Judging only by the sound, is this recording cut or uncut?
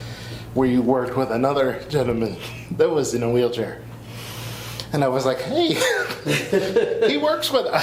uncut